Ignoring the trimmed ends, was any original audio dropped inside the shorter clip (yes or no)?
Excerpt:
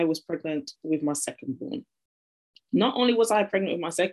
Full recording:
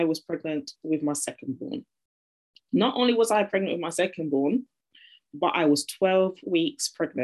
no